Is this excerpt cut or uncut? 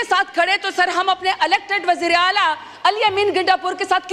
uncut